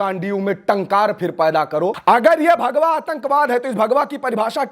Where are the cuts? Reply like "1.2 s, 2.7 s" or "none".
2.0 s